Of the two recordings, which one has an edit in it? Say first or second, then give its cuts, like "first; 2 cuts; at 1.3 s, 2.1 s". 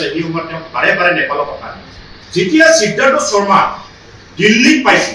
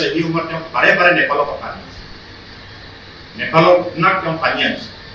first; 1 cut; at 2.2 s